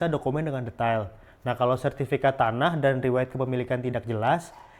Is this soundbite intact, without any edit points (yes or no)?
yes